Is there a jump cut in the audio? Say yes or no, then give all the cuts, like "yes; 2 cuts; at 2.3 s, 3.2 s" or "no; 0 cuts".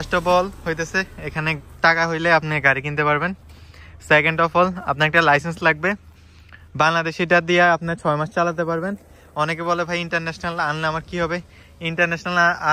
no; 0 cuts